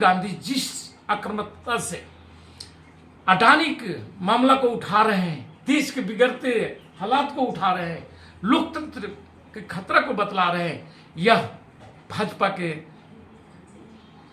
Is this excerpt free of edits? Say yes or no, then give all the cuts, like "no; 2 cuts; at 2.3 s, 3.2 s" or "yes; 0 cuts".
yes; 0 cuts